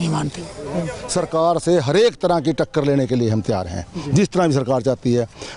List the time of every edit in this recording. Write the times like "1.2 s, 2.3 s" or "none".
1.0 s